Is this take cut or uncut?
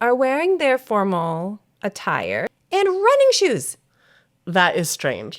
cut